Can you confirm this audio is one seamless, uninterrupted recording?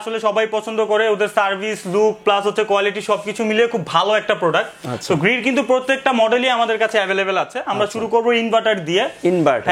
yes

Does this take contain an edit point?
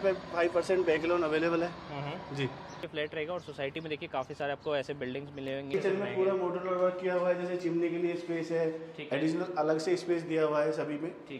yes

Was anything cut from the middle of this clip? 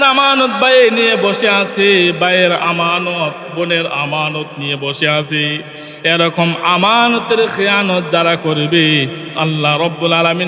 yes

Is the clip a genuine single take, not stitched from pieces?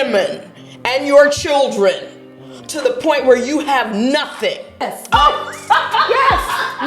no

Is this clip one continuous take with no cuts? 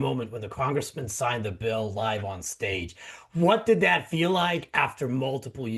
yes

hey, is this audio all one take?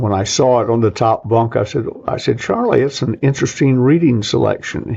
yes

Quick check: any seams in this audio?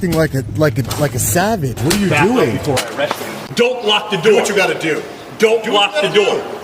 yes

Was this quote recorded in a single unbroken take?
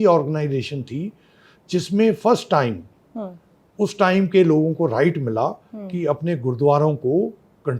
yes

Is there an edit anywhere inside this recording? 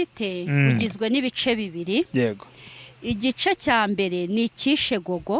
no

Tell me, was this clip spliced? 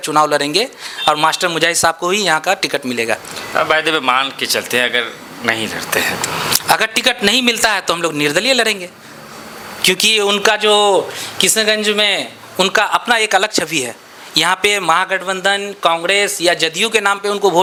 no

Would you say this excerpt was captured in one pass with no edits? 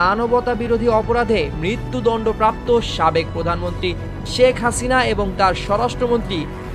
yes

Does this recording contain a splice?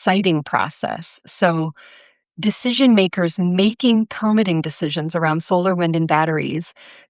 no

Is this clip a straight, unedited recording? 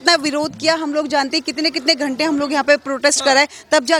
yes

